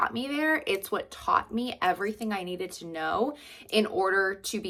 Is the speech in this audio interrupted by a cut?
no; 0 cuts

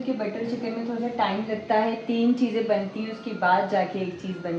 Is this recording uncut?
yes; 0 cuts

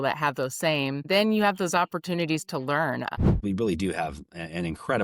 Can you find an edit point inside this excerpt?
yes; 2 cuts; at 1.1 s, 3.1 s

